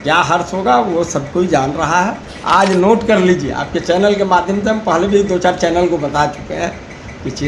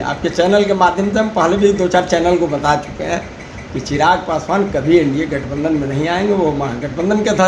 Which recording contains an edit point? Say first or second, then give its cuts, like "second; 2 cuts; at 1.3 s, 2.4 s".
first; 1 cut; at 2.3 s